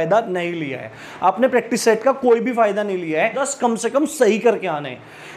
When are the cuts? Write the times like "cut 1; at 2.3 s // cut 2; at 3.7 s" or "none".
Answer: cut 1; at 3.4 s